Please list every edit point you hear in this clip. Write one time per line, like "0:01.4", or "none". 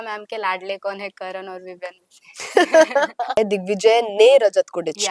0:03.4